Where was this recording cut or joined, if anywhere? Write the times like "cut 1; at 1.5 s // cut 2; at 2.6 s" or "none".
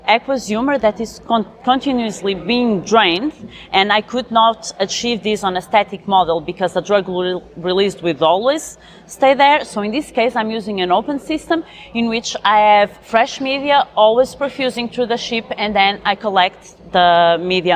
cut 1; at 13.0 s